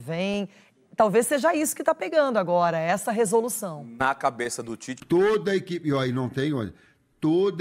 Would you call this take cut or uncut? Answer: cut